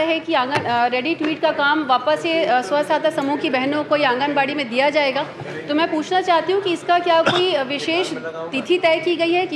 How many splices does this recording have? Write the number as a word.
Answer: zero